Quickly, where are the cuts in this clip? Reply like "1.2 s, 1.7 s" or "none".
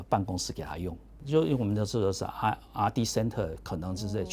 1.2 s